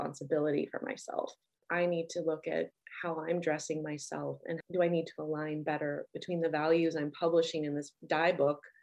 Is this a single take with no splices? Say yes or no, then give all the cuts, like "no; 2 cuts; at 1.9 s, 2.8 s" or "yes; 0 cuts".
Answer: yes; 0 cuts